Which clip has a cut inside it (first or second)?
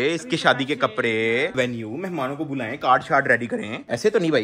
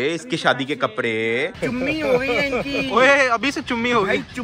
second